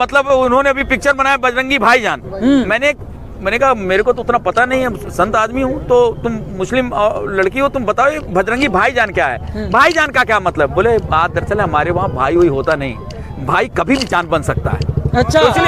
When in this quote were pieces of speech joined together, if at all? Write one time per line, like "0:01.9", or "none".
none